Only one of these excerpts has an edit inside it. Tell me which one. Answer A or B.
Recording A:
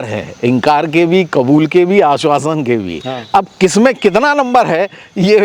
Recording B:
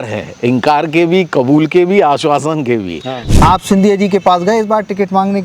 B